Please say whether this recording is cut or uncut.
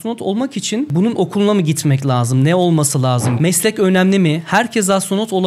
cut